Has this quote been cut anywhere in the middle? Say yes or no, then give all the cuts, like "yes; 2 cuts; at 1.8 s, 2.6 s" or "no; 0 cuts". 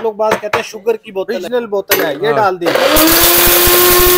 yes; 2 cuts; at 1.4 s, 2.7 s